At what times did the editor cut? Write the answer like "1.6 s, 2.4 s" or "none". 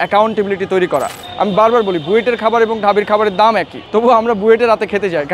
1.2 s, 3.8 s